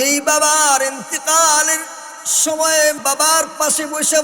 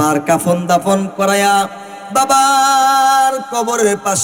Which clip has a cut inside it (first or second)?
first